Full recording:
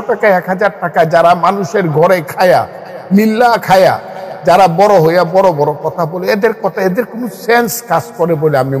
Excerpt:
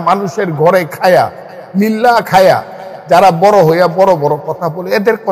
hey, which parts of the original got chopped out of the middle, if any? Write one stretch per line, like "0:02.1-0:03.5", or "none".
none